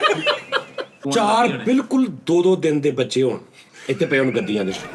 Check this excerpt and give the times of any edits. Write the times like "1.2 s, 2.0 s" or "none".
0.9 s